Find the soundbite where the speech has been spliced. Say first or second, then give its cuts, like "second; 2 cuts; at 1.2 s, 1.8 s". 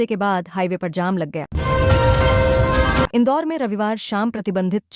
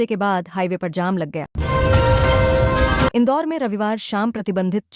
second; 2 cuts; at 1.5 s, 3.1 s